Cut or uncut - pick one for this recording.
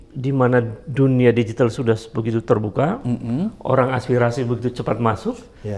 uncut